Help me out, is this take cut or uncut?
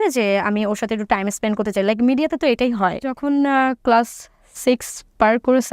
cut